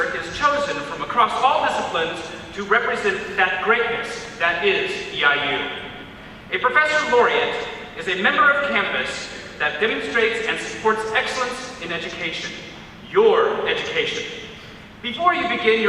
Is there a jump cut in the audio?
yes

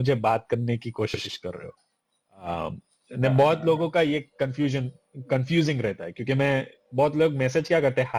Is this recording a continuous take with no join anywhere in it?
yes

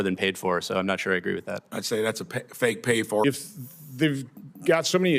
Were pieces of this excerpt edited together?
yes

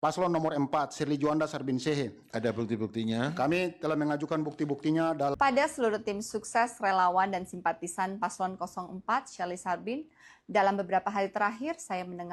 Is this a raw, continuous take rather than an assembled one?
no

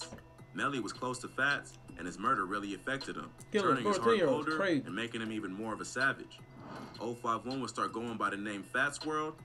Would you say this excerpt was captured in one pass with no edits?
yes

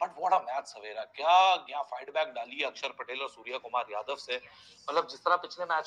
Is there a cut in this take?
no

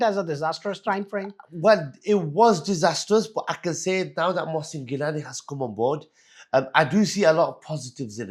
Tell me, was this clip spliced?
no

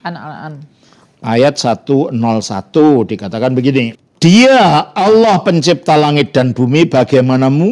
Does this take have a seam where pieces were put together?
yes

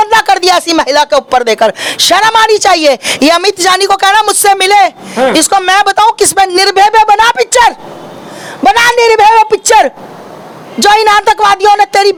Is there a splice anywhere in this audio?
no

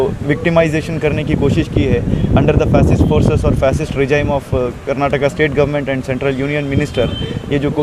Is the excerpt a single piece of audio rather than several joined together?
yes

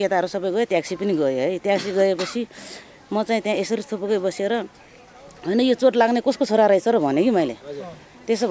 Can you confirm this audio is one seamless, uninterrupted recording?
yes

